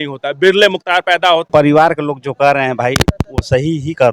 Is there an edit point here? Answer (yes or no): yes